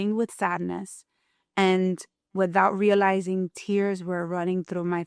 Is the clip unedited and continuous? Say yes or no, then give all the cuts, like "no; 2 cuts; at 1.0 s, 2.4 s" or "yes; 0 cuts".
yes; 0 cuts